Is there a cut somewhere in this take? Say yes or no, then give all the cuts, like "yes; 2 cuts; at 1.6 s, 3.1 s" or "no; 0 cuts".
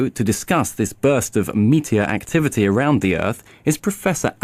no; 0 cuts